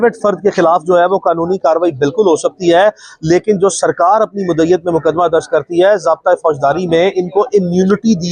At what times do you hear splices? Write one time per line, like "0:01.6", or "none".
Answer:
none